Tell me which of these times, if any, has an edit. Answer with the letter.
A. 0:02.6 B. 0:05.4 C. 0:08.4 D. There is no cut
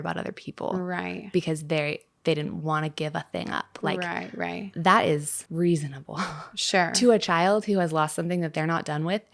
B